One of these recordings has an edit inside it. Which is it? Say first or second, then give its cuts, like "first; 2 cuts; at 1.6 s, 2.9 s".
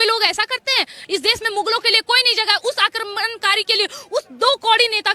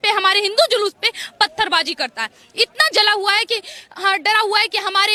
first; 1 cut; at 1.0 s